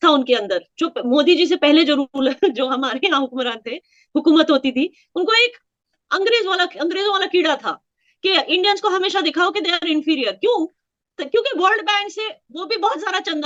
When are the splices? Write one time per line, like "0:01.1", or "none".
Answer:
none